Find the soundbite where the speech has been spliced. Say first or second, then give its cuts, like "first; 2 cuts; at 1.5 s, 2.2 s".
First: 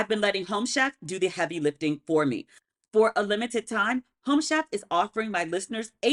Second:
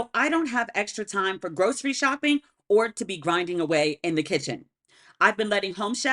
first; 1 cut; at 2.5 s